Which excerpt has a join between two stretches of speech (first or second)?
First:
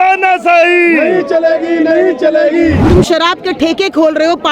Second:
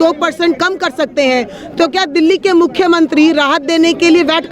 first